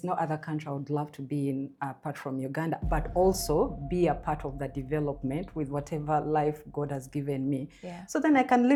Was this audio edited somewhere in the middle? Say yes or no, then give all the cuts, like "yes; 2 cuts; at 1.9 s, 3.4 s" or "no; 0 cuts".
no; 0 cuts